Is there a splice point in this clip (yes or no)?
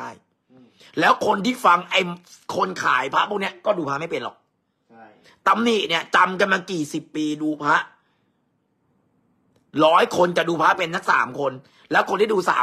no